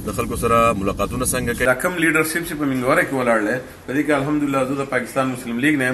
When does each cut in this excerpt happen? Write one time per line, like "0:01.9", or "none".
0:01.6